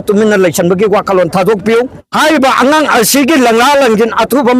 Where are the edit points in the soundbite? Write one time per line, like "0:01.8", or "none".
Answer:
0:02.0

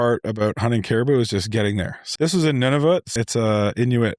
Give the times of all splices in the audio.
0:02.0
0:03.1

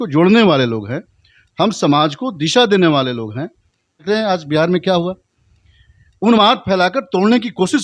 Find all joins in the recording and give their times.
0:04.0

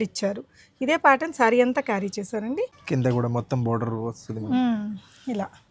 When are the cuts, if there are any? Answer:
0:02.8

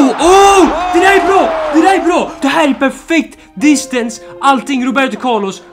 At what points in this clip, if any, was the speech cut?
none

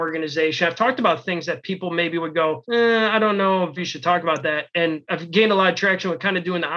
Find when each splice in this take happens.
0:02.6
0:03.8
0:05.1

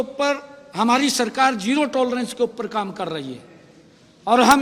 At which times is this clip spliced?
none

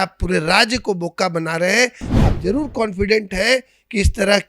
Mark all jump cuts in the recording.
0:02.1

